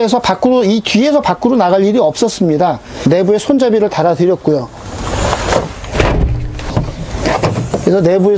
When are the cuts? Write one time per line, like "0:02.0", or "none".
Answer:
0:02.9
0:06.7